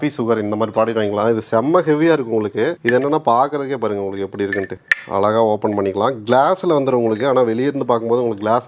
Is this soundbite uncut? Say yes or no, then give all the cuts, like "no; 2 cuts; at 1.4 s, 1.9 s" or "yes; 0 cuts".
yes; 0 cuts